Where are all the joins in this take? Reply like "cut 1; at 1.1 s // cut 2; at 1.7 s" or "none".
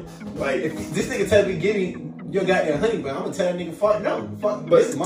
none